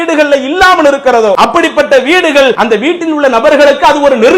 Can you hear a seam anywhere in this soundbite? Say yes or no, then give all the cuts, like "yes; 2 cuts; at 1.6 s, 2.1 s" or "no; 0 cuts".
yes; 2 cuts; at 1.4 s, 2.6 s